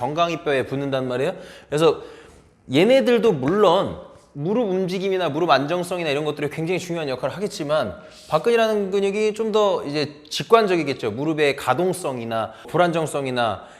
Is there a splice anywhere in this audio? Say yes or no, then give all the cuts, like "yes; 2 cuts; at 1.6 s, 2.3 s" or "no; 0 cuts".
yes; 1 cut; at 12.7 s